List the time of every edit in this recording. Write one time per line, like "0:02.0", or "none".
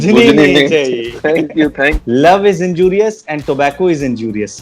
0:02.0